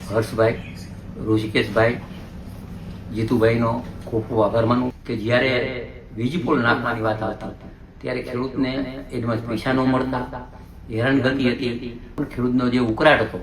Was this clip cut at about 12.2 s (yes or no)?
yes